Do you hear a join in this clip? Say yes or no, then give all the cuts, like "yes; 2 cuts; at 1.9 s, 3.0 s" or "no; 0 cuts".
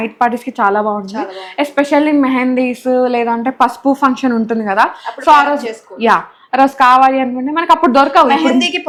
no; 0 cuts